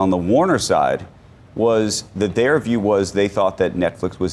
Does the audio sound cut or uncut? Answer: uncut